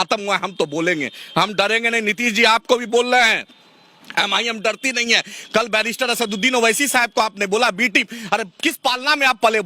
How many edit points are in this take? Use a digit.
0